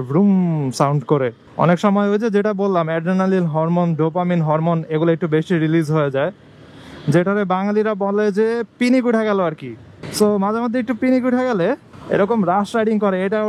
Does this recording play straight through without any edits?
no; 1 cut; at 1.4 s

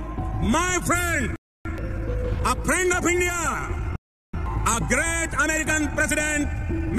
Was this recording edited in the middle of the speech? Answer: no; 0 cuts

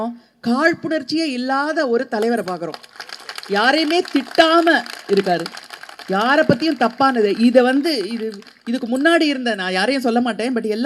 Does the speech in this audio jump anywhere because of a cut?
no; 0 cuts

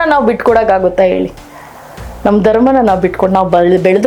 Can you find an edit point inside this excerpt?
no; 0 cuts

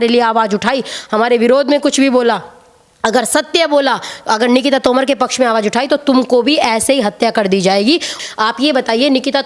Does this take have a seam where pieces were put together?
yes; 1 cut; at 8.2 s

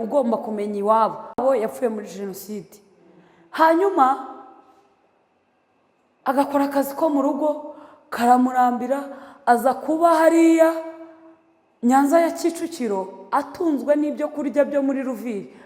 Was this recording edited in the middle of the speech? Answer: no; 0 cuts

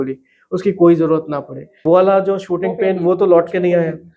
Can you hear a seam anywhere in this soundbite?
yes; 1 cut; at 1.8 s

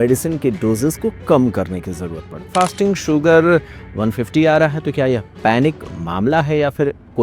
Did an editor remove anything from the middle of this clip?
yes; 1 cut; at 2.4 s

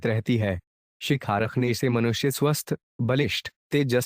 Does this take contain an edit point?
yes; 1 cut; at 1.0 s

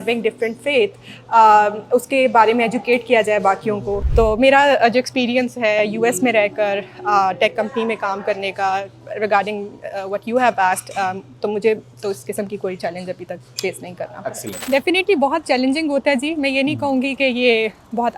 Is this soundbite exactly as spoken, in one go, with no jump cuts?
no; 2 cuts; at 4.0 s, 14.5 s

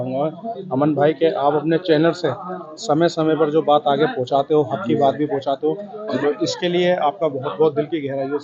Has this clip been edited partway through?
no; 0 cuts

